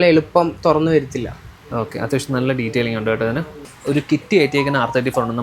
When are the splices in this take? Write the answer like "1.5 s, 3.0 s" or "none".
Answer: 3.6 s